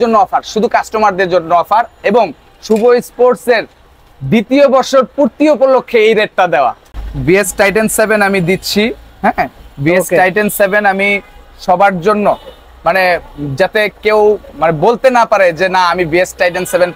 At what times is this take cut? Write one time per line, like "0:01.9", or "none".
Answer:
0:06.8